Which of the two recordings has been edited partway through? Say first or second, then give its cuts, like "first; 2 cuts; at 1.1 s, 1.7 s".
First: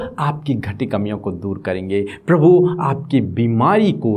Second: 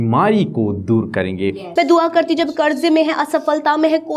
second; 1 cut; at 1.6 s